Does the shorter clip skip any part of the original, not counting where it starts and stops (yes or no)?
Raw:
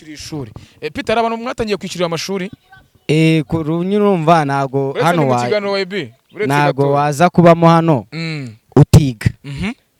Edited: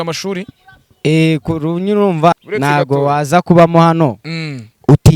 yes